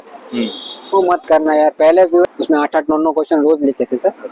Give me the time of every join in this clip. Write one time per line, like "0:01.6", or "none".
0:02.2